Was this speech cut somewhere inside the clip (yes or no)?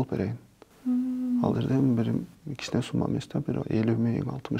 no